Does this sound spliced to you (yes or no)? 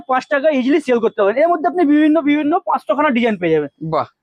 no